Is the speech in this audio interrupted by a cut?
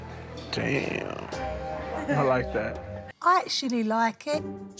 yes; 1 cut; at 3.1 s

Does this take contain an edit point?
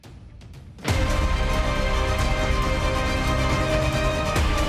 no; 0 cuts

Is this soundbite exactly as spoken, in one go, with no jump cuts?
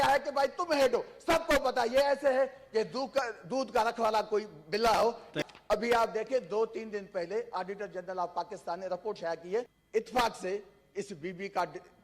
no; 2 cuts; at 5.4 s, 9.8 s

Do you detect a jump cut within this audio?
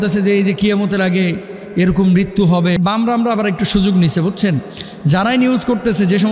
yes; 1 cut; at 2.8 s

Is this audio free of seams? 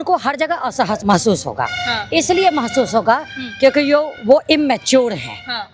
no; 1 cut; at 1.0 s

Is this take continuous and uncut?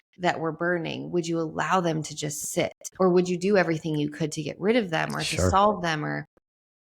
no; 1 cut; at 2.8 s

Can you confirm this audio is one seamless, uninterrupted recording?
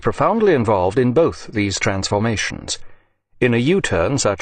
yes; 0 cuts

